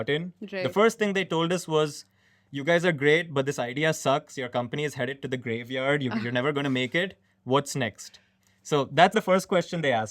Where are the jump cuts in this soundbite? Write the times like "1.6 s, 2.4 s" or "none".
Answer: 9.1 s

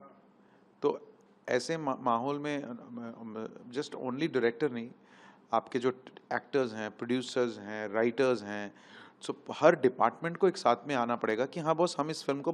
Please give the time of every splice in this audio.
none

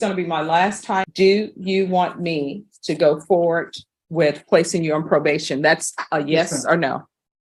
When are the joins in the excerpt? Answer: 1.1 s

